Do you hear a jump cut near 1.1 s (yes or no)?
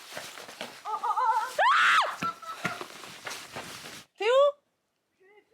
no